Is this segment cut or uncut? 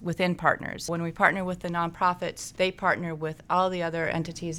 cut